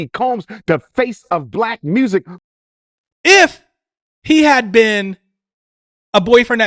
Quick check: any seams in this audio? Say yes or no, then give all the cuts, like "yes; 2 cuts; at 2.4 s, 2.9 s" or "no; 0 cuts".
yes; 1 cut; at 2.3 s